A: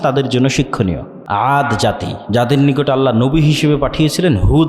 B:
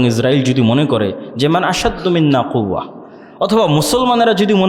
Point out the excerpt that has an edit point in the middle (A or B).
A